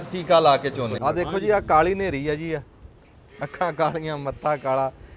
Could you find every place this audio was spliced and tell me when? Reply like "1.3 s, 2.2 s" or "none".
0.9 s